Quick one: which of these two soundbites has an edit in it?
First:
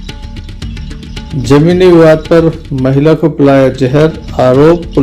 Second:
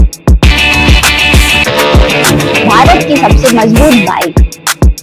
first; 1 cut; at 1.3 s

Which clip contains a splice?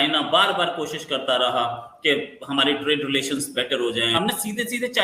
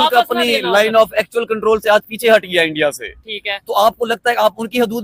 first; 1 cut; at 4.1 s

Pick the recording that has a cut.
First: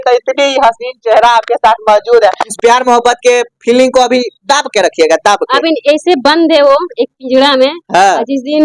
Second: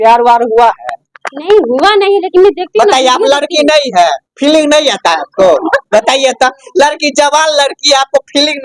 first; 1 cut; at 2.5 s

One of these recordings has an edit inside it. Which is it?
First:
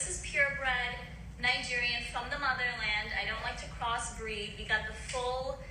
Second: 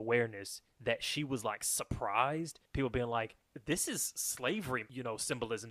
second; 3 cuts; at 2.6 s, 3.5 s, 4.9 s

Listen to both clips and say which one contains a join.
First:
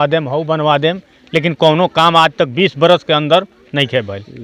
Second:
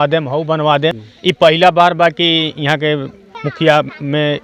second; 2 cuts; at 1.1 s, 3.2 s

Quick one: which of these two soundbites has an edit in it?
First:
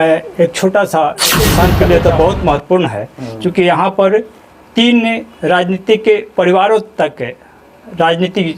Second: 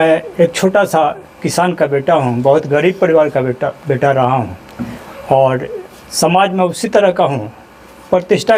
first; 1 cut; at 1.7 s

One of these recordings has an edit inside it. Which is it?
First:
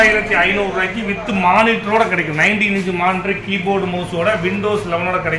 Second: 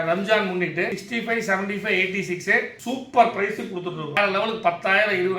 second; 3 cuts; at 1.0 s, 2.7 s, 4.2 s

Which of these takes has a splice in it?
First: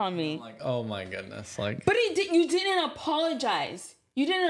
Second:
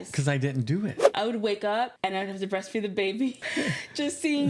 second; 3 cuts; at 1.1 s, 1.9 s, 3.4 s

